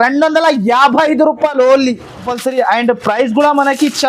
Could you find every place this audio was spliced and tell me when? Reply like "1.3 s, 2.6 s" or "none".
2.3 s